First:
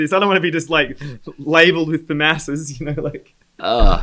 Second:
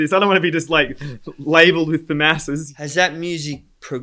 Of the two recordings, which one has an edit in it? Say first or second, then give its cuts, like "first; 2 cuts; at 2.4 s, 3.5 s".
second; 1 cut; at 2.7 s